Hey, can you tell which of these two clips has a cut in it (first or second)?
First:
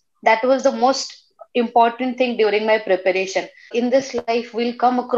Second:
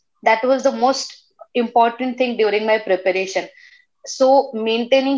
first